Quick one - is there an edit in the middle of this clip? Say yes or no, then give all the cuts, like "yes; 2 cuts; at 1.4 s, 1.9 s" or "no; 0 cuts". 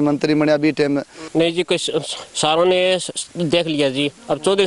yes; 1 cut; at 1.2 s